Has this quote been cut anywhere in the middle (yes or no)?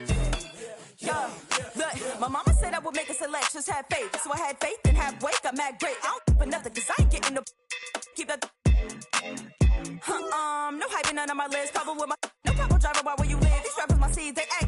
no